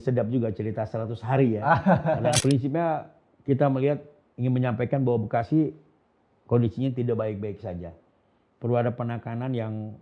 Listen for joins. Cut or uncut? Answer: cut